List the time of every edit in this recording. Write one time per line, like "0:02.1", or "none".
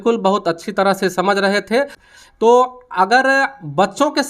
0:02.0